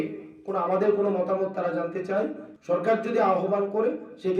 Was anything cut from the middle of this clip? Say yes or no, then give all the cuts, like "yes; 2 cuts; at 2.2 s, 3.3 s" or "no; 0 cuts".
yes; 1 cut; at 2.5 s